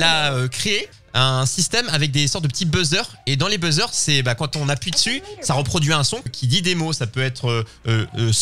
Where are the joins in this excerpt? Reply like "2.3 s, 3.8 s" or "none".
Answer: 1.0 s, 6.3 s